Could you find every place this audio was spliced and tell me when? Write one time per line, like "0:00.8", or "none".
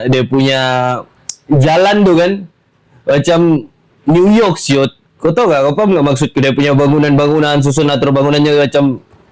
none